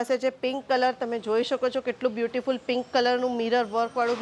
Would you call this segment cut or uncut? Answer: uncut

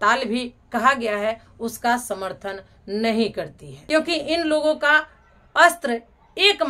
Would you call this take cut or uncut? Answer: cut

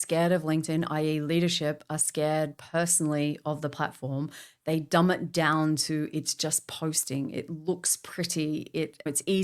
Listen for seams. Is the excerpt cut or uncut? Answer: uncut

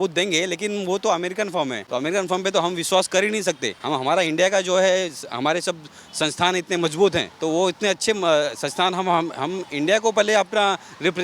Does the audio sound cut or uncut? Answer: cut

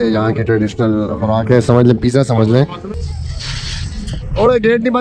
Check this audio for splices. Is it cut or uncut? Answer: cut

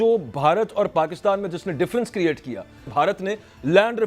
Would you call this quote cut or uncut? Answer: cut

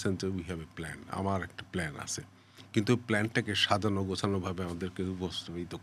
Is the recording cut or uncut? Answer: uncut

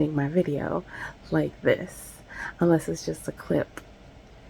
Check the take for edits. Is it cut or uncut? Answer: uncut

